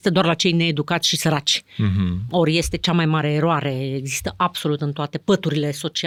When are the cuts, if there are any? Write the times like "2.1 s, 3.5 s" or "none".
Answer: none